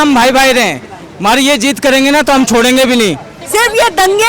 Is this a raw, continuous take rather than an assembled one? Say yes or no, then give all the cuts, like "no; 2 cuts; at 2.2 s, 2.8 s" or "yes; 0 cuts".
no; 1 cut; at 3.3 s